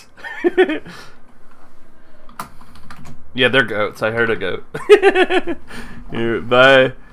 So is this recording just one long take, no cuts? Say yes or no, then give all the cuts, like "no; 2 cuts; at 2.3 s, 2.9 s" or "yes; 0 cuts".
yes; 0 cuts